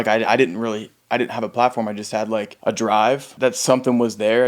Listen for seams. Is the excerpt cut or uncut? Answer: cut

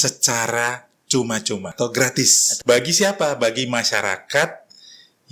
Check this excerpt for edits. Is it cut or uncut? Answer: cut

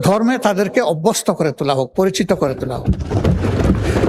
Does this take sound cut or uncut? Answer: uncut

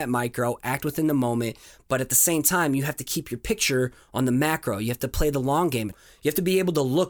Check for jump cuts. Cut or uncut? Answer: cut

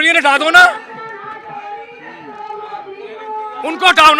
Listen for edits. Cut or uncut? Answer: uncut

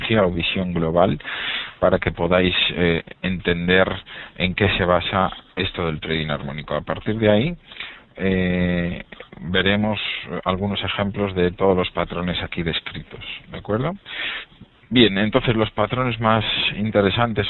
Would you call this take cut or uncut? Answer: uncut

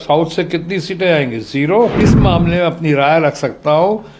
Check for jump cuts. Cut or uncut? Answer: cut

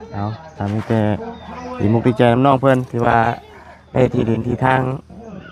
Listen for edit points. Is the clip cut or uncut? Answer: uncut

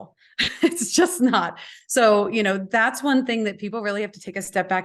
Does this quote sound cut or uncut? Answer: uncut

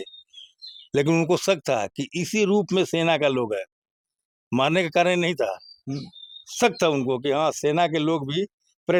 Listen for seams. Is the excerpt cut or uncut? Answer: uncut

